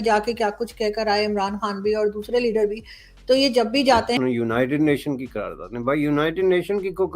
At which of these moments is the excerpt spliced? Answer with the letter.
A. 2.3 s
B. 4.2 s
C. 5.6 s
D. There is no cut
B